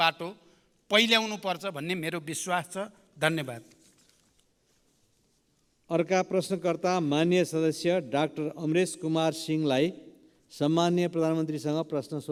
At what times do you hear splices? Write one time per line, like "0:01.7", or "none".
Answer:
none